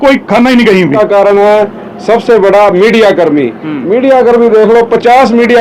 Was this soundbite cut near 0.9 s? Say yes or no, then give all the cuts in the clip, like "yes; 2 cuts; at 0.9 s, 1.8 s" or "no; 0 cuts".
yes; 1 cut; at 0.9 s